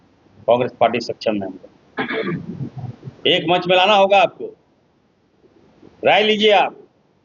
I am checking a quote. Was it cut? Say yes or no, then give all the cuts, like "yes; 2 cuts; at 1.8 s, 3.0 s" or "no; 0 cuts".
no; 0 cuts